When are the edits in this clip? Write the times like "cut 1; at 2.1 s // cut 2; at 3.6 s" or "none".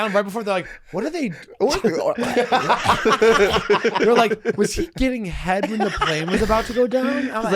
none